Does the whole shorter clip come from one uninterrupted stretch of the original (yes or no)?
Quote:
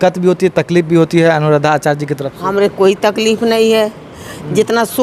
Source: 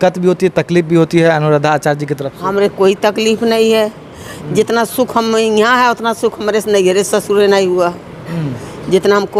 yes